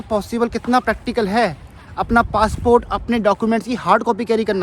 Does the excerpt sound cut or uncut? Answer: uncut